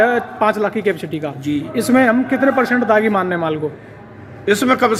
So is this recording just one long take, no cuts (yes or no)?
yes